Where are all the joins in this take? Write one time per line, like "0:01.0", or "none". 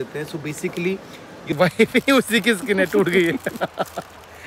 0:01.5